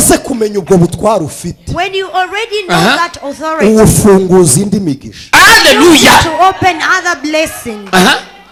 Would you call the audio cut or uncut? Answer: uncut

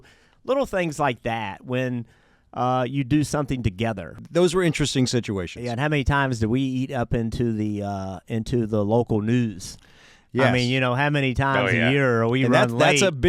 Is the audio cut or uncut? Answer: cut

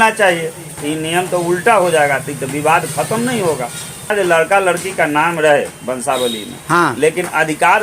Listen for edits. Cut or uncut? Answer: cut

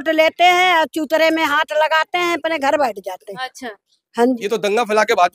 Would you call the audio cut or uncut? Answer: cut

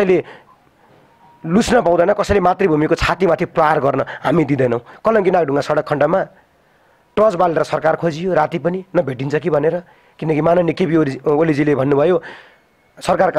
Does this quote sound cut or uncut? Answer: cut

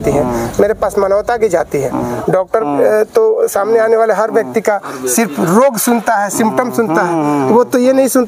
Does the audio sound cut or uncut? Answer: uncut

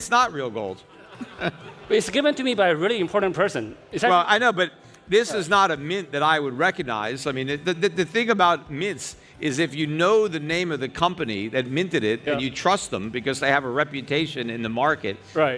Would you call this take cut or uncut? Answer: uncut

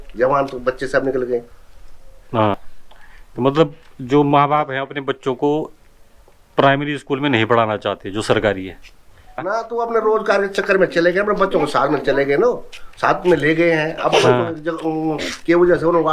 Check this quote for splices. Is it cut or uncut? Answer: cut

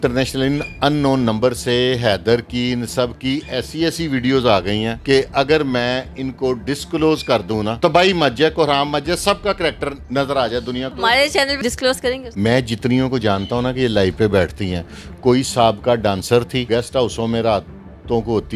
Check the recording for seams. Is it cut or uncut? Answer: cut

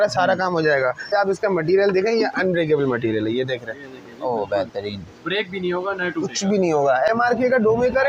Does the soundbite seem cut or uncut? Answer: cut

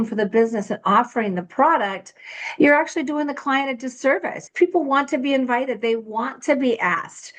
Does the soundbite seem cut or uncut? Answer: cut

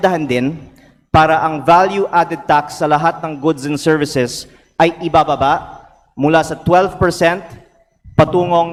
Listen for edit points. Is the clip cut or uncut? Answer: uncut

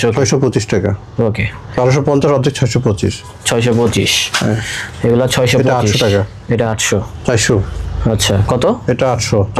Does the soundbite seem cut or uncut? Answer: uncut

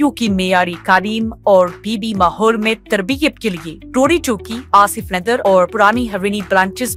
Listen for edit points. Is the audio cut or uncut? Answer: uncut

